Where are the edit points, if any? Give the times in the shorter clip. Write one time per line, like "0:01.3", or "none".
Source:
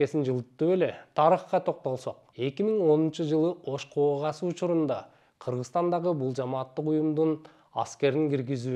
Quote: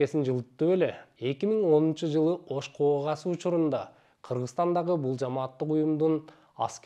0:01.0